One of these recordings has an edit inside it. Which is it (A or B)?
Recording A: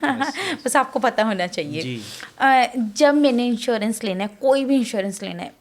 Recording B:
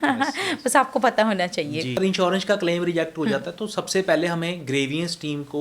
B